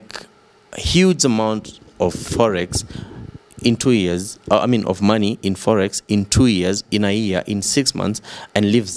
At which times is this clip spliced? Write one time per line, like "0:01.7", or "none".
none